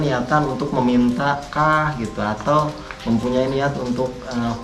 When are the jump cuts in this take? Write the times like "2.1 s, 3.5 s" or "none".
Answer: none